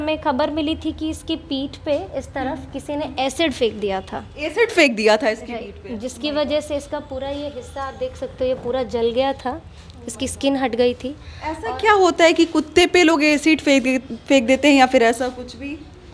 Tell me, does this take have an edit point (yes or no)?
no